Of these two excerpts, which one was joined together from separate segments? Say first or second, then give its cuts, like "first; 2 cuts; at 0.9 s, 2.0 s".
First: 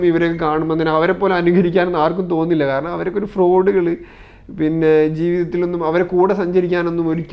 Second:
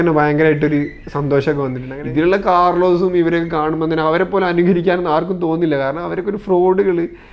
second; 1 cut; at 1.8 s